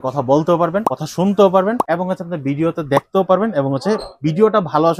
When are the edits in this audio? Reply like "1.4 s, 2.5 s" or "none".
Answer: 1.0 s, 1.8 s